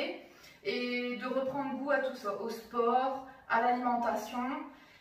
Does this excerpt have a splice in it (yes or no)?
no